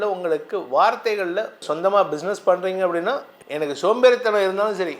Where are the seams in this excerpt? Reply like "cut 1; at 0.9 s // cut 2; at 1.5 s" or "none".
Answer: cut 1; at 1.6 s